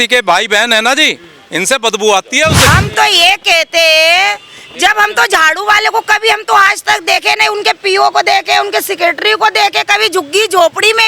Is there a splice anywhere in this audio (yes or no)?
yes